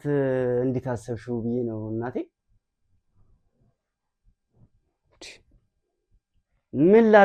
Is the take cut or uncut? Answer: uncut